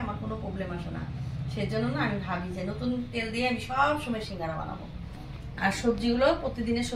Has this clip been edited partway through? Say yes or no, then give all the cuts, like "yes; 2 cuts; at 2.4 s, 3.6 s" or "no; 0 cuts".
no; 0 cuts